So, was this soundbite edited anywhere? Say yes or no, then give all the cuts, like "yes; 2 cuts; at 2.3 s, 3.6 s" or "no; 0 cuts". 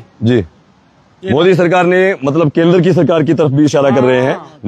no; 0 cuts